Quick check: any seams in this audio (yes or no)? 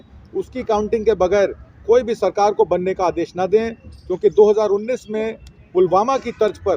no